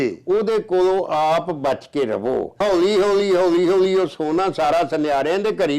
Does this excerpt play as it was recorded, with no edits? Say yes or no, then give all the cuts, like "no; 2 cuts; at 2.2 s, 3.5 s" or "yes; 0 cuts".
no; 1 cut; at 2.6 s